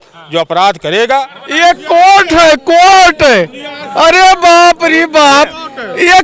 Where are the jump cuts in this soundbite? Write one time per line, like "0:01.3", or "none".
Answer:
0:01.4